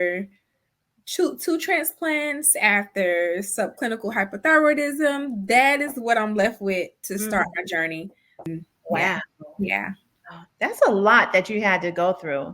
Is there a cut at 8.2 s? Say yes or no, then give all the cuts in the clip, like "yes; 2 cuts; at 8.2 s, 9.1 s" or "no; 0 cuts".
yes; 1 cut; at 8.2 s